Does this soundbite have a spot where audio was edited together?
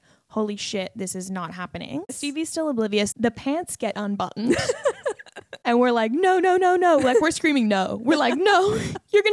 yes; 2 cuts; at 2.1 s, 3.1 s

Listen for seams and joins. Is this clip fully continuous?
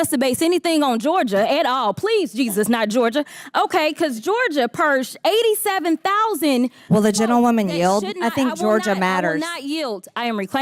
yes; 0 cuts

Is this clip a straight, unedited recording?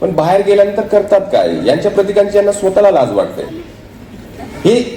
yes; 0 cuts

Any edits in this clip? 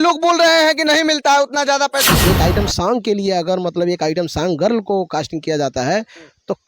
yes; 1 cut; at 2.2 s

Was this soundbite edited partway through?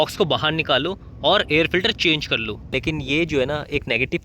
yes; 1 cut; at 2.7 s

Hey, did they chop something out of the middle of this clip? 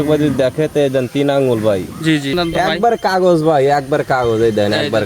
yes; 1 cut; at 2.3 s

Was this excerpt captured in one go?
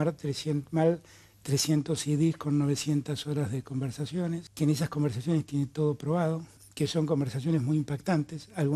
no; 2 cuts; at 4.5 s, 6.6 s

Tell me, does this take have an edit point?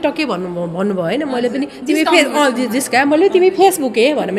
no; 0 cuts

